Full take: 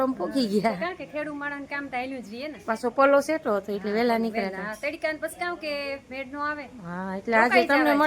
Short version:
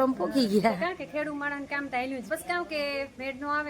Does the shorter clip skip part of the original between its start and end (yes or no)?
yes